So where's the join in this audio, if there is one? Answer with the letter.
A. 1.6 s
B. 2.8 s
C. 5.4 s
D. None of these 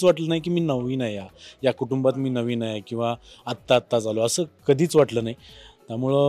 D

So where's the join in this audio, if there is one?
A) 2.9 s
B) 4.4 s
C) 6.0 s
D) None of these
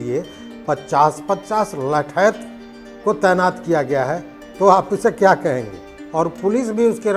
C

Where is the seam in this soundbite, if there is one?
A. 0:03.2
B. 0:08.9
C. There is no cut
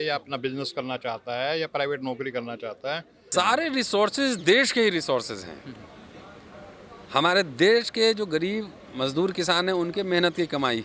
A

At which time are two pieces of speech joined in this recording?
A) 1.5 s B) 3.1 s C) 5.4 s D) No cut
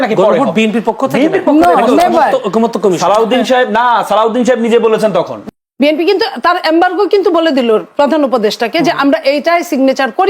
C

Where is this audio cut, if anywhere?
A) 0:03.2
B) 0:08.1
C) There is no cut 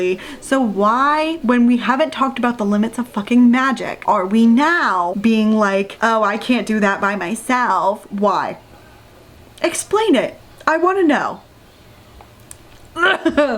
C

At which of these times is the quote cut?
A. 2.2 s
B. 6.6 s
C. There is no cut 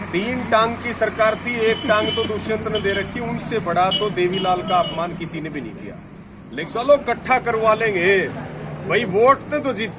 B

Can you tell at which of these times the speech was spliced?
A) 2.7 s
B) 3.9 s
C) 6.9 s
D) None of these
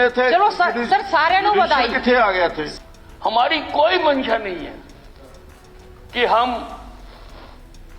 A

